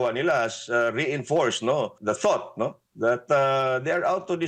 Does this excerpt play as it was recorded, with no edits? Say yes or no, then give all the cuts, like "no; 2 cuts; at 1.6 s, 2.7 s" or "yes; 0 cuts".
no; 1 cut; at 2.0 s